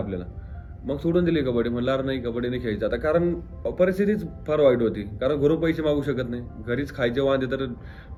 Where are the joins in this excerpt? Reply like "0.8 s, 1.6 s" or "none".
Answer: none